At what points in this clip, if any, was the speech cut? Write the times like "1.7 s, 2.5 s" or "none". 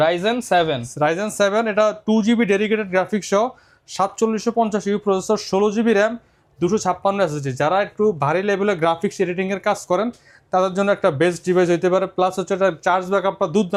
none